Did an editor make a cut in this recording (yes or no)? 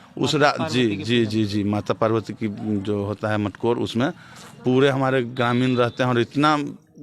no